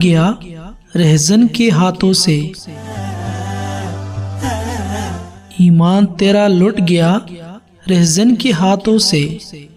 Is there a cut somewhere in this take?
no; 0 cuts

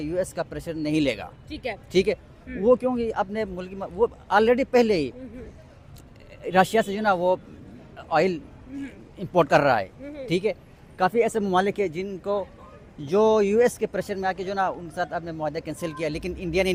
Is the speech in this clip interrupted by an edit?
no; 0 cuts

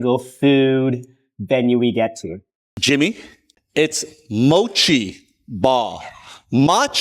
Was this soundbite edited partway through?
yes; 1 cut; at 2.7 s

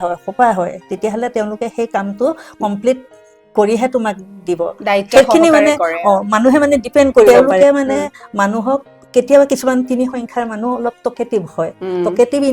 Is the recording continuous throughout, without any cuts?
no; 1 cut; at 7.3 s

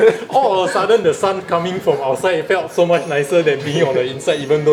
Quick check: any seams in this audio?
no; 0 cuts

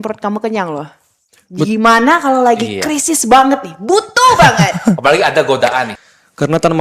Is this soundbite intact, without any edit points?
no; 1 cut; at 5.9 s

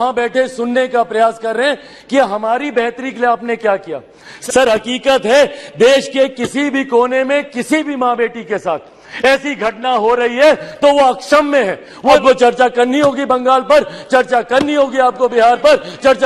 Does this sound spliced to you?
yes; 2 cuts; at 4.2 s, 12.2 s

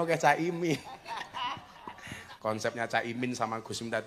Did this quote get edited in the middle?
yes; 1 cut; at 2.3 s

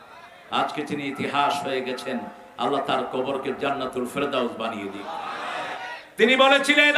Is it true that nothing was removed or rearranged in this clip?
no; 1 cut; at 5.8 s

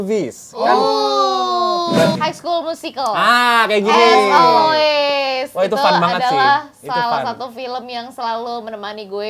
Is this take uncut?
no; 1 cut; at 2.2 s

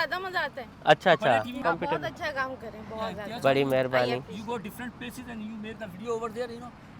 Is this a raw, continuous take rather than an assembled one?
yes; 0 cuts

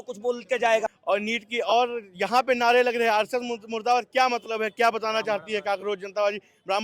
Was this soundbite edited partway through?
yes; 1 cut; at 0.9 s

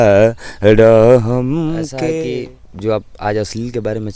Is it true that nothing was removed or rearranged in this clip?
no; 1 cut; at 2.3 s

